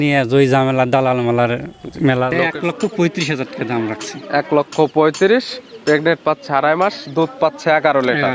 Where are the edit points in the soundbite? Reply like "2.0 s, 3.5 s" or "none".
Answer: 2.3 s